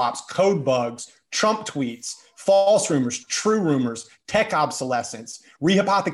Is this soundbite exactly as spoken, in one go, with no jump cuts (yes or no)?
yes